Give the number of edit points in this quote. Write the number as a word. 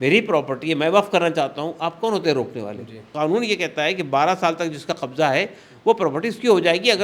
one